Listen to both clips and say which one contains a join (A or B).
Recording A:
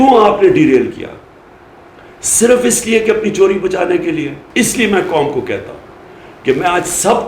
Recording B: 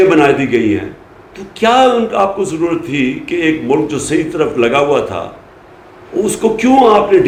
A